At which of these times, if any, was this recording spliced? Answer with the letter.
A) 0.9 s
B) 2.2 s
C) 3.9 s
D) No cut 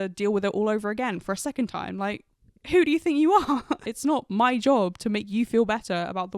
C